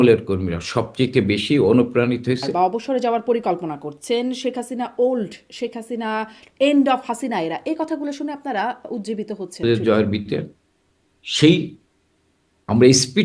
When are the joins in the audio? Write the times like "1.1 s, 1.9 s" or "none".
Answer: 2.5 s, 9.6 s